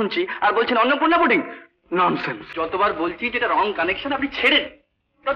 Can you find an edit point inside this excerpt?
yes; 1 cut; at 2.4 s

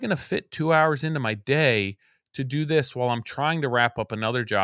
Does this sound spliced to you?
no; 0 cuts

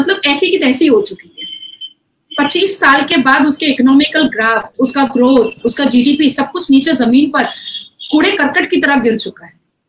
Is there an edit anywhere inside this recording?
no; 0 cuts

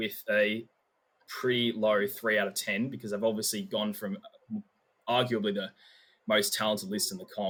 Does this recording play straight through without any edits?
yes; 0 cuts

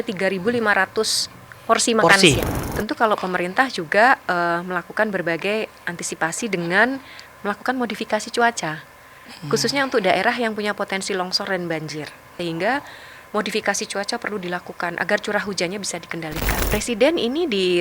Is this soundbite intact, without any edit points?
no; 3 cuts; at 2.6 s, 12.3 s, 16.4 s

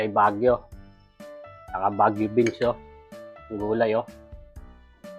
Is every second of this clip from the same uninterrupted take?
no; 1 cut; at 4.1 s

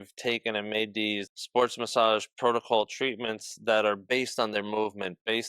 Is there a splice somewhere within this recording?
yes; 1 cut; at 1.2 s

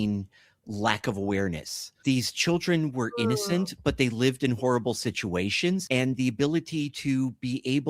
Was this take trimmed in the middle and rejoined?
yes; 2 cuts; at 2.0 s, 5.8 s

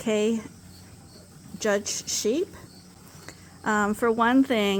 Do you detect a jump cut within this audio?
no; 0 cuts

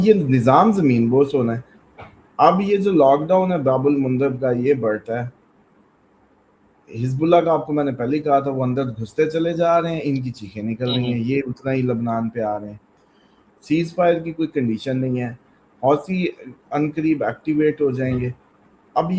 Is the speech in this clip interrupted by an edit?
no; 0 cuts

